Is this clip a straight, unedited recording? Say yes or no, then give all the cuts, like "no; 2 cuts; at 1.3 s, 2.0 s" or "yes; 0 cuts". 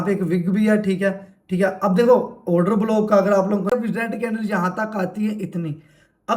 no; 1 cut; at 3.7 s